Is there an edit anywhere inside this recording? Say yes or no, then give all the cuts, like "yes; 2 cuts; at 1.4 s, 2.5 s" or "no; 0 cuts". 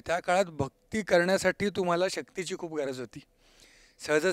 no; 0 cuts